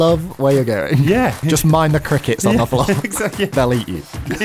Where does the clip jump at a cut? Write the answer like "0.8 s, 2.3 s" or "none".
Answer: 1.4 s, 3.5 s

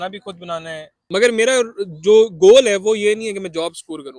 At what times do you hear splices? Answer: 0.9 s

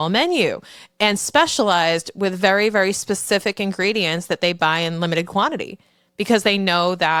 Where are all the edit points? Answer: none

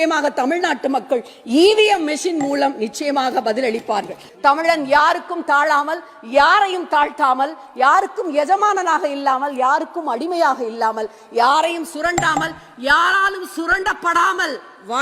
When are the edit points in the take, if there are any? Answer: 4.2 s

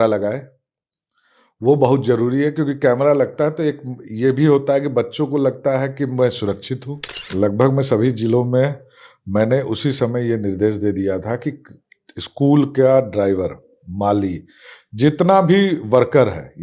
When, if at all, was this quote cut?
7.2 s

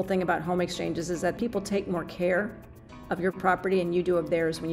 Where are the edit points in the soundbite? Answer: 1.4 s

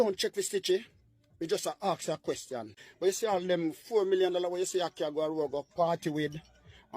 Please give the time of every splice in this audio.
2.8 s

